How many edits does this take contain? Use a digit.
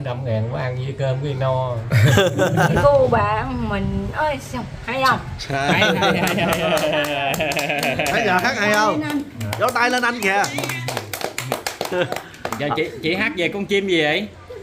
1